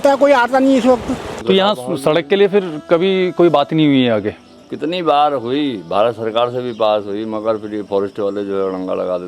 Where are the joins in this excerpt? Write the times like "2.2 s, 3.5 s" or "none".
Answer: 1.3 s